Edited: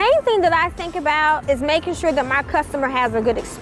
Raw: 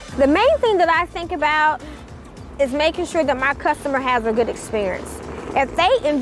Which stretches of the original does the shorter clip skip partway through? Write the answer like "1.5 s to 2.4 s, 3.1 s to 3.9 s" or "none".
1.8 s to 2.5 s